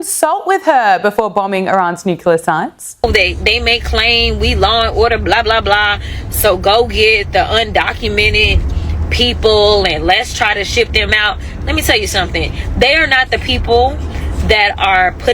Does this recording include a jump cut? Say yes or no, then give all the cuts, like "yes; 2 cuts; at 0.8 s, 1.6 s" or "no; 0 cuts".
yes; 1 cut; at 3.0 s